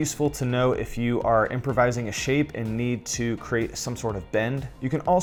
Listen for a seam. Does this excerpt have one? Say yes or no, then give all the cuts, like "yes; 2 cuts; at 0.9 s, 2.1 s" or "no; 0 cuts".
no; 0 cuts